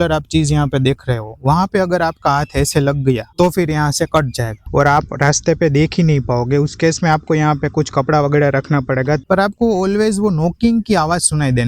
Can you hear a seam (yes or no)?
yes